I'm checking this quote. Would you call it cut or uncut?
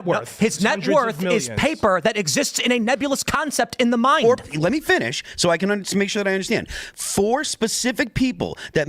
cut